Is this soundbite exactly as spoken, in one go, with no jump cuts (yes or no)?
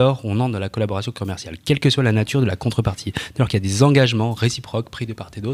yes